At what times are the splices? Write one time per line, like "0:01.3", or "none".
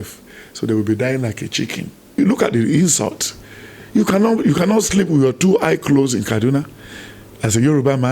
0:02.1